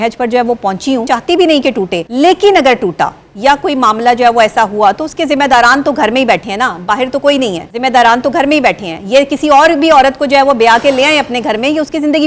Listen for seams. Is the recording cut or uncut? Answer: cut